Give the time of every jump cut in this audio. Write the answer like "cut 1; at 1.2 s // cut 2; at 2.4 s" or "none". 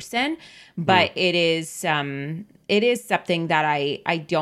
none